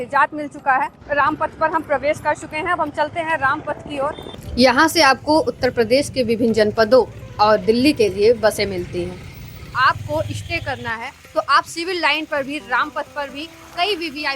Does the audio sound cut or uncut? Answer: cut